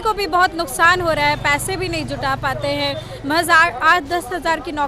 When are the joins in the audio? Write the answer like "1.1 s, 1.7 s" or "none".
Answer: none